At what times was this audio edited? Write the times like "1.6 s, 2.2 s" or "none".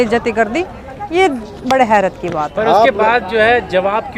none